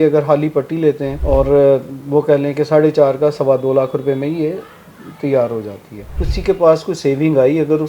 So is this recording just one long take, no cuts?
no; 2 cuts; at 1.1 s, 6.2 s

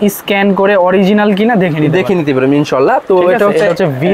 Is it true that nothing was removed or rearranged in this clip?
yes; 0 cuts

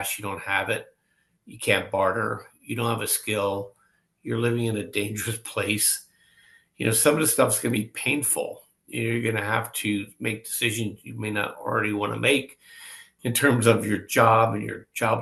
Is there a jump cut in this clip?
no; 0 cuts

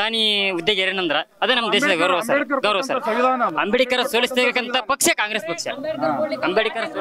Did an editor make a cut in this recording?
no; 0 cuts

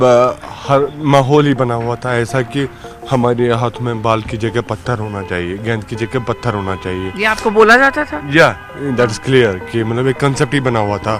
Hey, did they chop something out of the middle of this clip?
no; 0 cuts

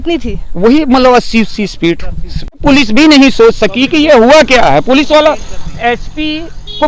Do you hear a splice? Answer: yes; 1 cut; at 2.6 s

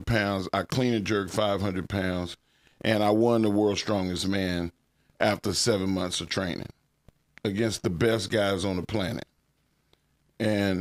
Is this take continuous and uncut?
yes; 0 cuts

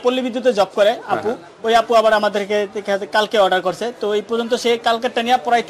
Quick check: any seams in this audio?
no; 0 cuts

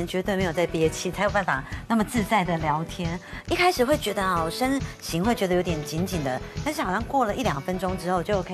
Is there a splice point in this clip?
no; 0 cuts

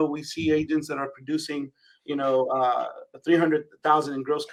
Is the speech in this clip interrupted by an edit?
no; 0 cuts

